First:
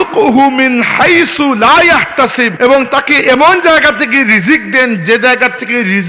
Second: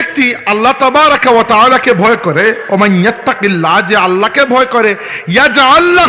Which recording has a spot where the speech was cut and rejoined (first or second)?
first